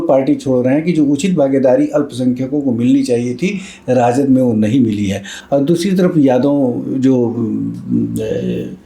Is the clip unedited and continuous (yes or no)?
yes